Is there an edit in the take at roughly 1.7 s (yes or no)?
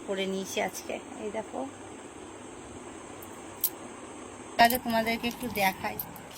no